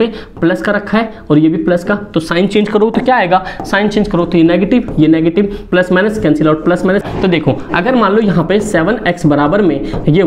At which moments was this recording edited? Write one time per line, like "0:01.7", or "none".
0:07.0

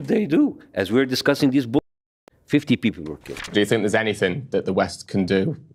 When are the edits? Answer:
0:03.3

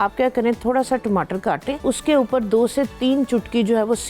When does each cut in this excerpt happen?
0:01.8

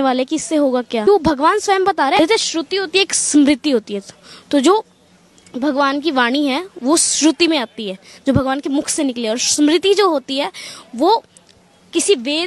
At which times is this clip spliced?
0:01.1
0:02.2

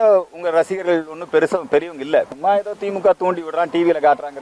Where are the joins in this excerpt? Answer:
0:02.3

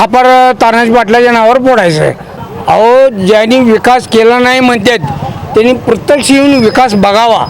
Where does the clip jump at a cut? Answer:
0:02.3

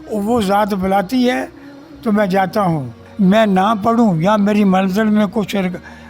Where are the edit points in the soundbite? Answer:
0:03.0

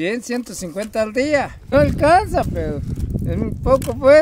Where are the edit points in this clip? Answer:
0:01.6

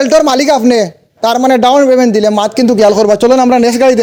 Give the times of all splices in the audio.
none

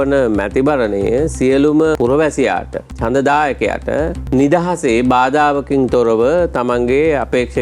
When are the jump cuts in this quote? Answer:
0:02.3
0:04.2

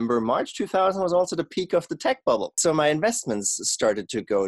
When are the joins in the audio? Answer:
none

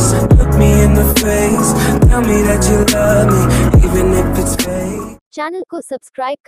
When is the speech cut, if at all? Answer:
0:05.2

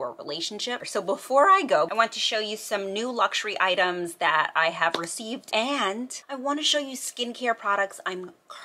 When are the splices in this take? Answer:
0:00.9
0:01.9
0:05.7

